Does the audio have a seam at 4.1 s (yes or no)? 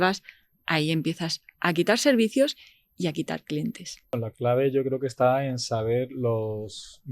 yes